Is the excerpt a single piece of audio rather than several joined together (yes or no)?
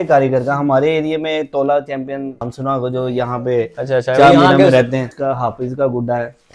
no